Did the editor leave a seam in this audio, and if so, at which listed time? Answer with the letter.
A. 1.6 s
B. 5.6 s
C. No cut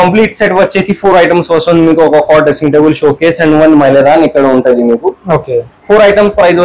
B